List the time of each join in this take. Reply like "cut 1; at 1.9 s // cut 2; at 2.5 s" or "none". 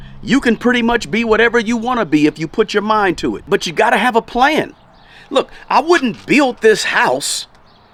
none